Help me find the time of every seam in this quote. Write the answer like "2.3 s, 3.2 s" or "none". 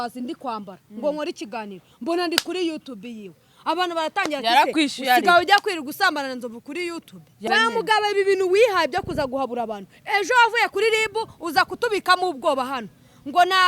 7.4 s